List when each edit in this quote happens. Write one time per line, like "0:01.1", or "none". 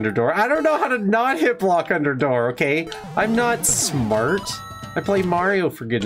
none

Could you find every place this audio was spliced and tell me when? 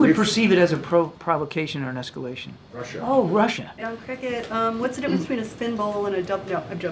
0:04.0

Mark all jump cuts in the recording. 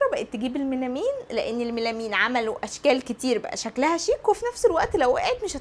none

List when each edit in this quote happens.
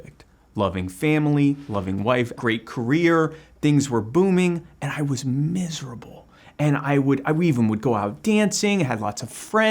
0:02.3

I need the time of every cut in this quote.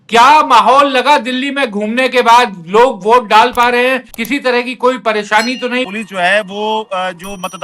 0:04.1
0:05.9

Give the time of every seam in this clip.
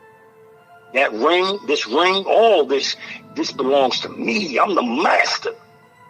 0:00.9

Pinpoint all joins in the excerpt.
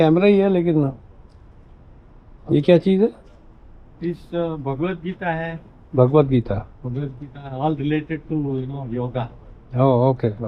none

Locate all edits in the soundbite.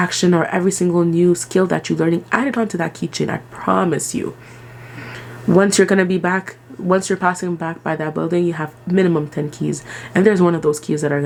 none

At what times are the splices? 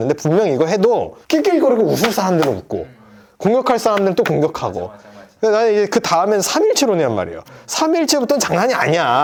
none

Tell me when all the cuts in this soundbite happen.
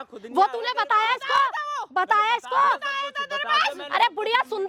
none

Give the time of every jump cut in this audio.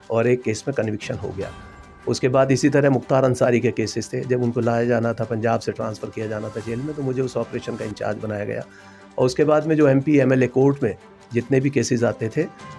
none

